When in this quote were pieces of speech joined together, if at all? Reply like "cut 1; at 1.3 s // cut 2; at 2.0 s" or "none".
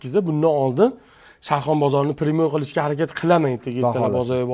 none